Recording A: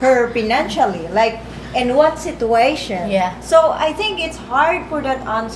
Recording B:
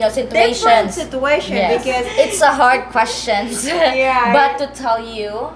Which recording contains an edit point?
B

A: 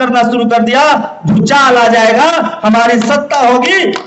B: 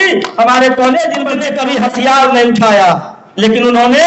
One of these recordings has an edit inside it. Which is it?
B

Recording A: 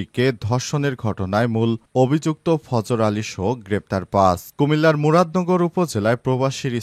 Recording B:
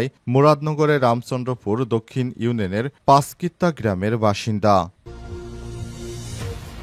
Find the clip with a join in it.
B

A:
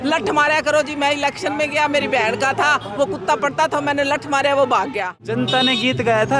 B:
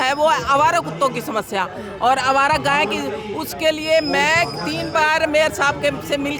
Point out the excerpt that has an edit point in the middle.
A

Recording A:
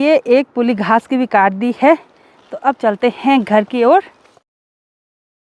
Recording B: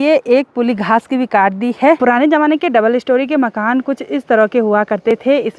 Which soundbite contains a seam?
B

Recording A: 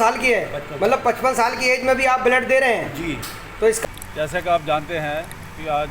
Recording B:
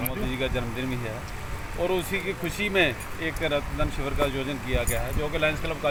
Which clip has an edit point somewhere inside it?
A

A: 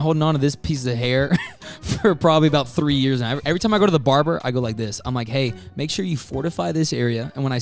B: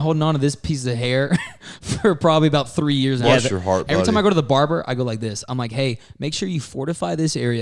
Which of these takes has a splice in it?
A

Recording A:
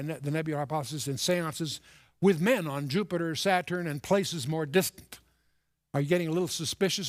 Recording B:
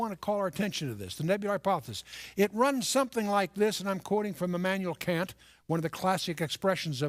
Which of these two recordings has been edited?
A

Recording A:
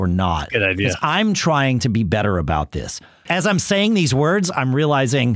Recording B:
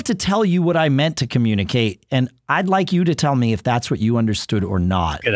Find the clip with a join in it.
A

